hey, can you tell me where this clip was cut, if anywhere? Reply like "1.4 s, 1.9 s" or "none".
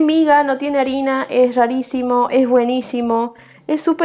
none